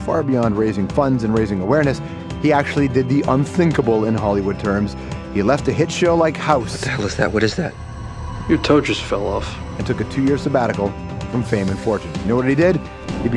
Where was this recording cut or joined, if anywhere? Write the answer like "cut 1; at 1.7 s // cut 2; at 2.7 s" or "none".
none